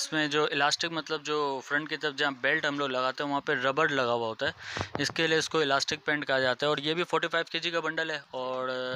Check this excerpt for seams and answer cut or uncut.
uncut